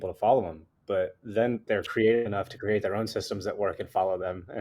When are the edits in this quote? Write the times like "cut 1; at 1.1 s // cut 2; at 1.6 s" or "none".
cut 1; at 1.7 s